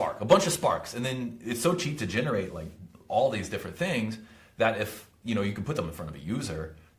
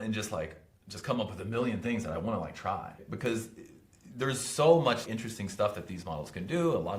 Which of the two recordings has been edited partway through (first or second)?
second